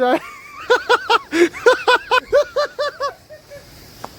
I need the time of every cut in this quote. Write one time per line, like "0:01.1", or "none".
0:02.2